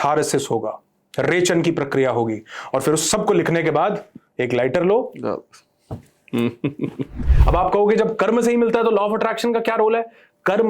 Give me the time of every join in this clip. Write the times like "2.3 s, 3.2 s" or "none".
7.3 s